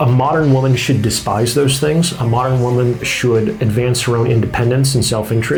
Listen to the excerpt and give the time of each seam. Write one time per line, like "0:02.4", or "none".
none